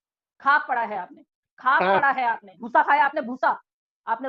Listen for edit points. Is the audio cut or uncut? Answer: cut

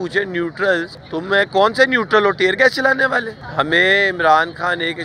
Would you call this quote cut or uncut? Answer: cut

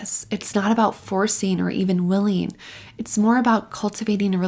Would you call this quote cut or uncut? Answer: uncut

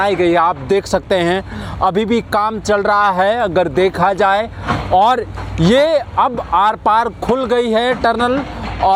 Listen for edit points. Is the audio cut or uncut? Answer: uncut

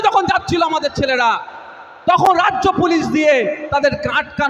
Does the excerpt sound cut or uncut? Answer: uncut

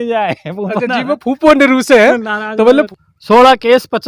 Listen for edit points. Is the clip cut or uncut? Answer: cut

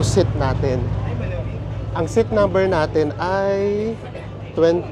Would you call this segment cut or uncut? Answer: uncut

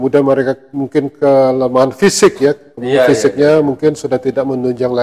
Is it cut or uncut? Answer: uncut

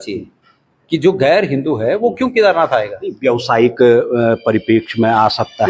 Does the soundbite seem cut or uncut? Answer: uncut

